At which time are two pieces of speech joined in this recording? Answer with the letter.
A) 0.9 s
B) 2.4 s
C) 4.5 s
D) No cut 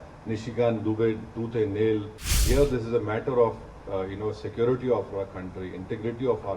B